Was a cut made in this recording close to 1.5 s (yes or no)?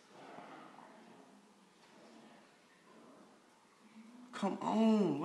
yes